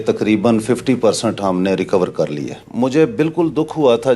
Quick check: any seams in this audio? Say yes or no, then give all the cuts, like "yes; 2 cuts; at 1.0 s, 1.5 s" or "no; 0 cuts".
yes; 1 cut; at 2.6 s